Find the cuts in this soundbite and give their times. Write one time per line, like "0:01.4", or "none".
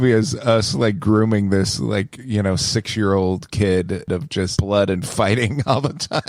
0:04.4